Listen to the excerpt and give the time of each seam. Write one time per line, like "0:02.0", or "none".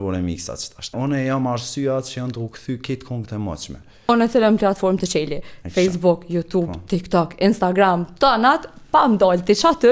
0:00.9
0:04.1